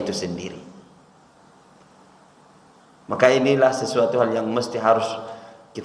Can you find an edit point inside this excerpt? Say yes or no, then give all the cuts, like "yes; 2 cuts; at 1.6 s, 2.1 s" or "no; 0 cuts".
no; 0 cuts